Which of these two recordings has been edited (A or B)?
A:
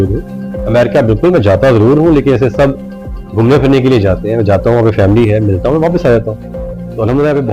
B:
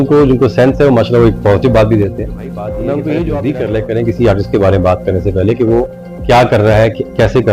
B